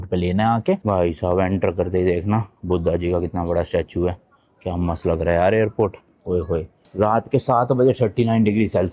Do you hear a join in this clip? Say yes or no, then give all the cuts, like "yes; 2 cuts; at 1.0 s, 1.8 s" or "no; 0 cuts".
yes; 2 cuts; at 0.8 s, 6.8 s